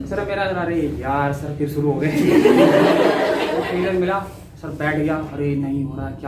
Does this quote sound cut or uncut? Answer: cut